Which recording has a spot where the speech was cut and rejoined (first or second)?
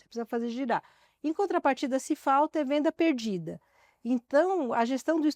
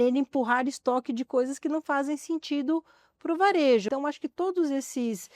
second